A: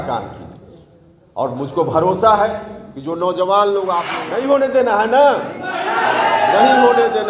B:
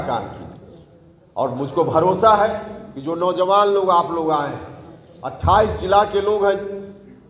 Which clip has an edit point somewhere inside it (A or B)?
A